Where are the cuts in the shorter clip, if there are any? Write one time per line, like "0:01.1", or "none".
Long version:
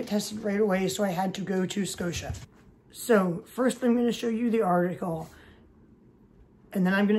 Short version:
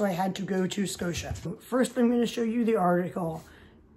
0:01.6